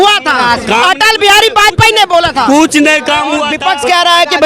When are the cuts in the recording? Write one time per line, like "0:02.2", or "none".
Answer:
0:03.5